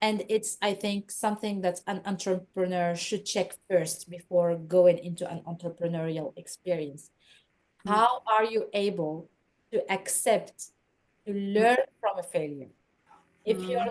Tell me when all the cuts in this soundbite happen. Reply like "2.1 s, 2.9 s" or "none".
none

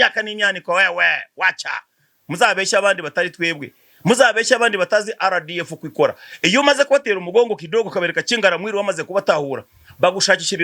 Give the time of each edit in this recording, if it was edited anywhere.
none

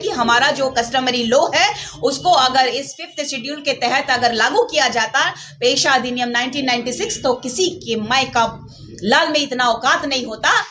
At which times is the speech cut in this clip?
none

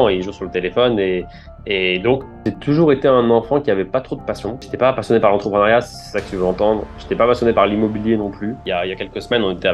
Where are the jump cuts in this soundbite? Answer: 2.4 s, 4.7 s, 8.6 s

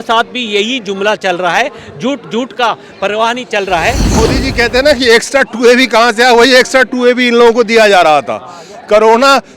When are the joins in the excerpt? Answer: 4.2 s

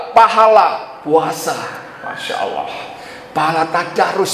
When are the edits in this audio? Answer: none

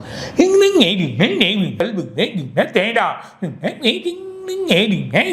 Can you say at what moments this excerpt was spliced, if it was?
1.8 s

